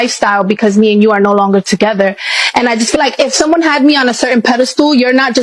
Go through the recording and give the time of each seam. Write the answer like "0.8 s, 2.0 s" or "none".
3.0 s

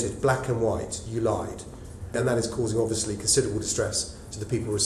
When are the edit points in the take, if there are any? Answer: 2.1 s

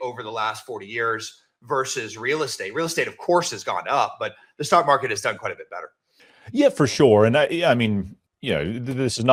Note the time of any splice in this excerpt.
none

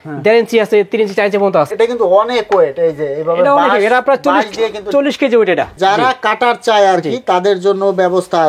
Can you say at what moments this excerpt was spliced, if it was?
1.7 s, 5.8 s

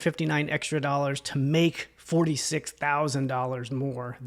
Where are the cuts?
none

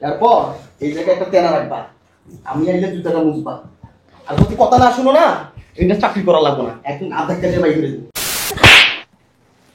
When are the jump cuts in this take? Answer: 8.5 s

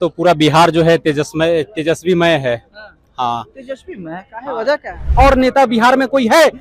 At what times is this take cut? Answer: 5.1 s

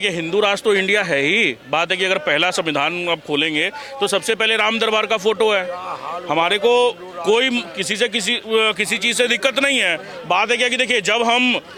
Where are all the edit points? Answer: none

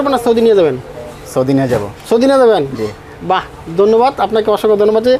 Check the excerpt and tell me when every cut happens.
none

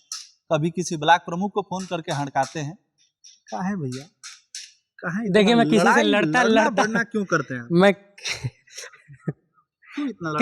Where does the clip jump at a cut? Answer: none

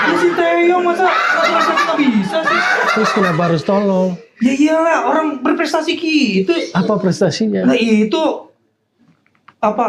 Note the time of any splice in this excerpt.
none

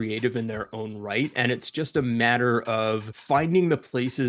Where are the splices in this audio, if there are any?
3.1 s

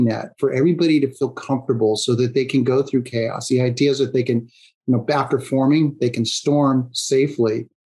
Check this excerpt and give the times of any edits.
none

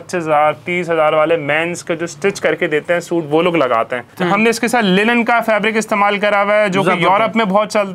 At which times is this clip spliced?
4.1 s

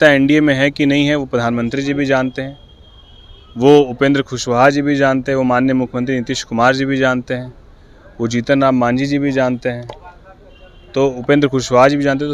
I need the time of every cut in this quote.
none

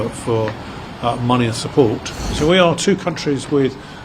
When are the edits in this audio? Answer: 2.2 s

